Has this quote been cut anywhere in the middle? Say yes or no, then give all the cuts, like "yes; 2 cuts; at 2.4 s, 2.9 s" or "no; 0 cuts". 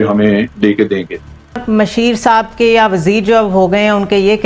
yes; 1 cut; at 1.6 s